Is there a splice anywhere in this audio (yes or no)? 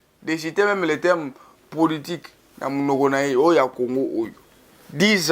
no